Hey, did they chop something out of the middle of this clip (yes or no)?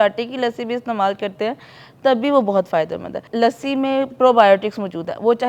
no